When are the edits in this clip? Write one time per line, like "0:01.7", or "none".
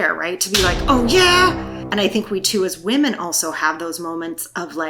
none

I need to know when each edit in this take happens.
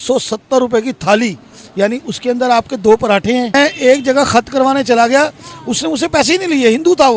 0:03.5

